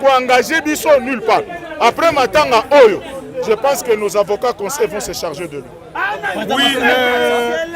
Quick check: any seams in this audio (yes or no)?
no